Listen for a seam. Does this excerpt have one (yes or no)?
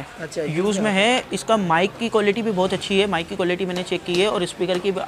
no